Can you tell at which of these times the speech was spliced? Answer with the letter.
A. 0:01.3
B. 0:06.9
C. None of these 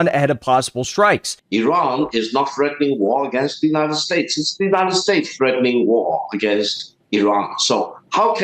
A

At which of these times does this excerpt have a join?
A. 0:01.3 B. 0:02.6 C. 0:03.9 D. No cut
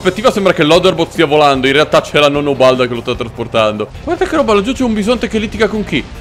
C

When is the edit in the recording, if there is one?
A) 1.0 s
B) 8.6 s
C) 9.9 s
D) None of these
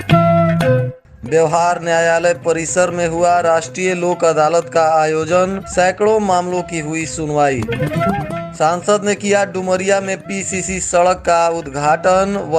A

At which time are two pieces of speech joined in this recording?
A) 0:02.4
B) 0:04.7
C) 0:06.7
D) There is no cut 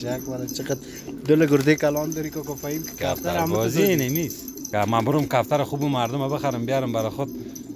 B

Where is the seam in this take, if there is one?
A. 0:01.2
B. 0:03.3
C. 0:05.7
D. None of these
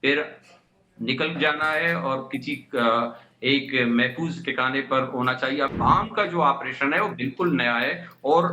C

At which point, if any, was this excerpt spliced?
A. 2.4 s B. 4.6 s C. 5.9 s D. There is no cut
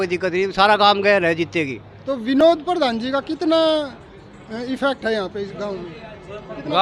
A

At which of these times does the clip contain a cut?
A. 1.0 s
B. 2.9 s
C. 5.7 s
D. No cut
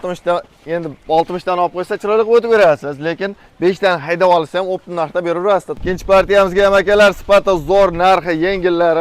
C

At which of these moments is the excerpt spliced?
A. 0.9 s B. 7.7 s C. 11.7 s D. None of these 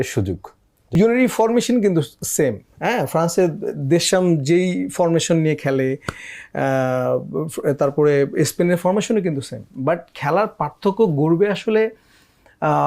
A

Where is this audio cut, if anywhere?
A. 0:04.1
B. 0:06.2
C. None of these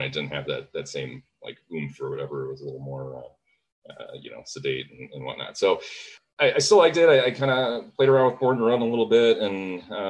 B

